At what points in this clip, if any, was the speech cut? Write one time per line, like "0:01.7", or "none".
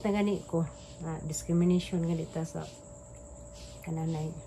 none

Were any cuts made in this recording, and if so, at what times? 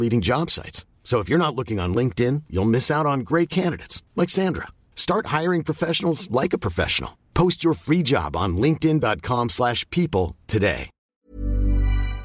0:10.9

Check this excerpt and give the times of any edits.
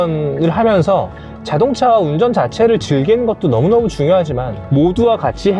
0:04.5

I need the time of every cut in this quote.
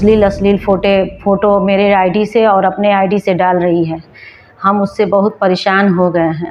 none

